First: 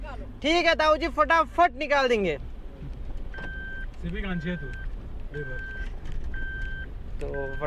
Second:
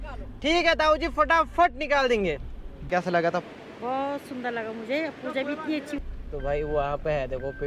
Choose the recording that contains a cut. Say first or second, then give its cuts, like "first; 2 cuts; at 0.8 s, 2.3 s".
second; 2 cuts; at 2.8 s, 6.0 s